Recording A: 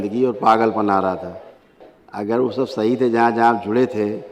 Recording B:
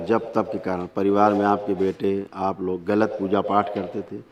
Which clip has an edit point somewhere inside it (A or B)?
A